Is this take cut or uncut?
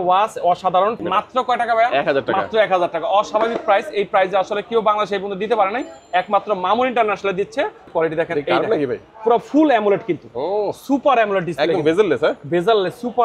cut